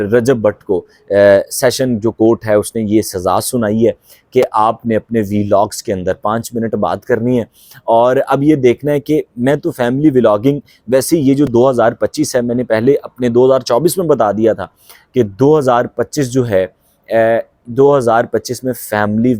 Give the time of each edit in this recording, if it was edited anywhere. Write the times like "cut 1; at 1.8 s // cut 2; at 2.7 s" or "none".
none